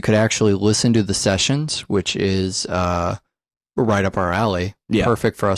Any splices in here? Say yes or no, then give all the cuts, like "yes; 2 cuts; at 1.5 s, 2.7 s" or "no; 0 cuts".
yes; 1 cut; at 3.2 s